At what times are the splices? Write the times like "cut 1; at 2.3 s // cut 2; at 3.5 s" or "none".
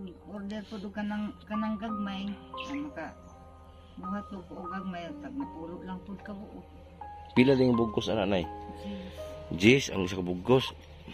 none